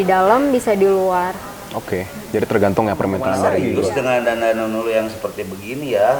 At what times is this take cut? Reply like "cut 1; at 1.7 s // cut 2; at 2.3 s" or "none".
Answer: cut 1; at 3.4 s